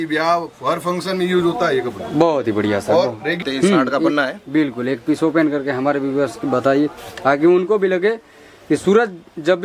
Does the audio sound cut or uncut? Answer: cut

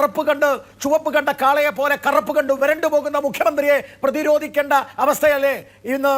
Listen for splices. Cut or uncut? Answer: uncut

